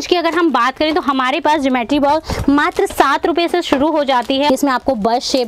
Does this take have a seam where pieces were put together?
yes; 1 cut; at 4.5 s

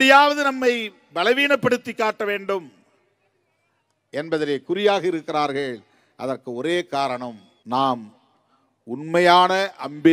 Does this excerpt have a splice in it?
yes; 1 cut; at 7.5 s

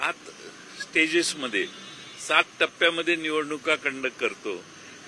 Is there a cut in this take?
no; 0 cuts

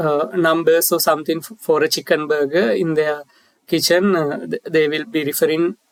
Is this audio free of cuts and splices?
yes; 0 cuts

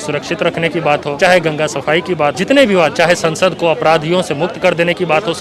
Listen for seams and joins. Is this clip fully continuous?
no; 2 cuts; at 1.1 s, 2.4 s

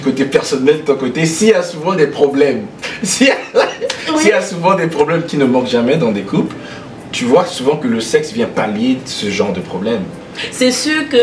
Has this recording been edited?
no; 0 cuts

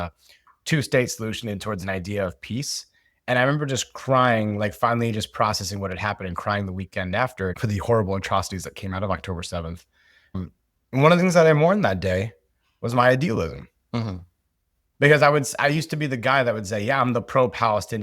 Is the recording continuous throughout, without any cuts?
no; 2 cuts; at 7.6 s, 10.4 s

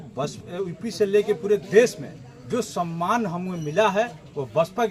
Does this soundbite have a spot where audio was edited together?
no; 0 cuts

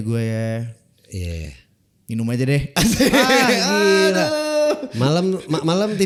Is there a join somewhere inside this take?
no; 0 cuts

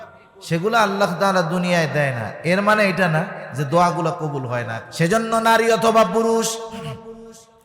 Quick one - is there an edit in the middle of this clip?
yes; 1 cut; at 4.8 s

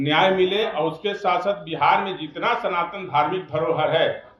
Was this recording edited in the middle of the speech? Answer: no; 0 cuts

